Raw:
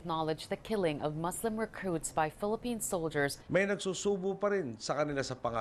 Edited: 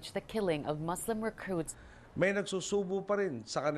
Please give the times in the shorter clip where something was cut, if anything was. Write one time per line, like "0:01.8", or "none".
0:01.9